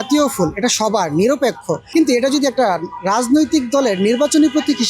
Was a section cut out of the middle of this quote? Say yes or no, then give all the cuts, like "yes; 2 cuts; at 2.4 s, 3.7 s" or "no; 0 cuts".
yes; 1 cut; at 1.8 s